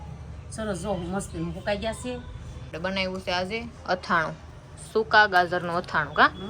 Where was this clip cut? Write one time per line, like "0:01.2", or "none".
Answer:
0:02.7